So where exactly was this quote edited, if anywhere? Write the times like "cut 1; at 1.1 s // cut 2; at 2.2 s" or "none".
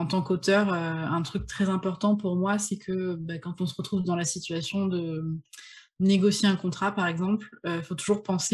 none